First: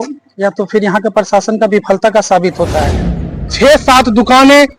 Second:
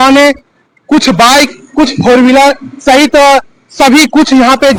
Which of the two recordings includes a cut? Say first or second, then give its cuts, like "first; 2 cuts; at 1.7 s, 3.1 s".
first; 1 cut; at 3.4 s